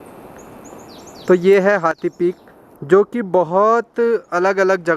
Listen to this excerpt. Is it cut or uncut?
uncut